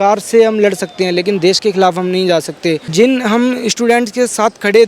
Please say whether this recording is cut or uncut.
cut